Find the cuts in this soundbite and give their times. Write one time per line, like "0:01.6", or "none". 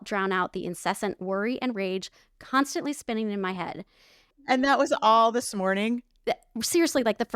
0:04.5